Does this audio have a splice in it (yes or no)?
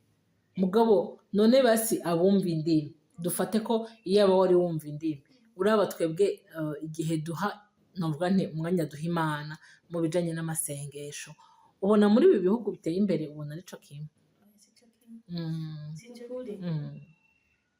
yes